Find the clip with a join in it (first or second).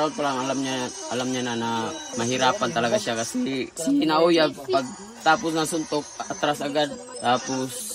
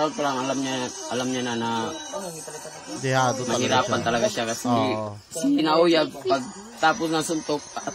first